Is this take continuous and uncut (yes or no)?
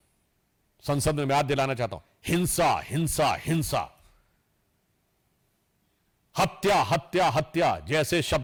yes